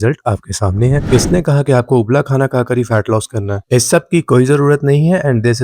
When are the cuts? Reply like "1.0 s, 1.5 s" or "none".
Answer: 1.0 s